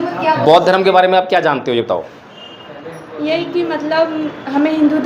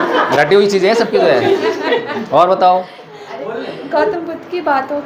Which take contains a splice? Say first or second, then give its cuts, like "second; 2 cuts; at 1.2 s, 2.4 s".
second; 1 cut; at 3.4 s